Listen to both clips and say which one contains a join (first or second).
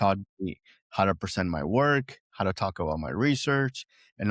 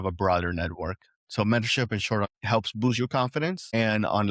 second